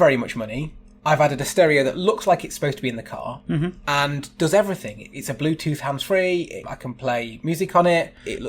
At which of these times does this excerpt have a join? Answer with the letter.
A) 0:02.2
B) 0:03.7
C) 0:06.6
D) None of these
C